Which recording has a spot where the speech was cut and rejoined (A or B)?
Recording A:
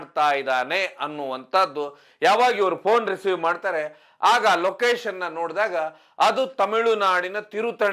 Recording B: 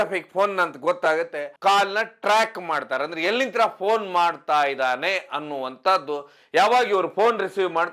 B